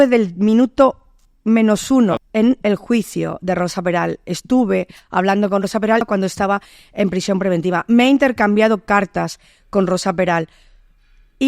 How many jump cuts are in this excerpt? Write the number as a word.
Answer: two